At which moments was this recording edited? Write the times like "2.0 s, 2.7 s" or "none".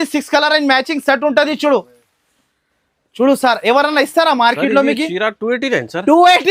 none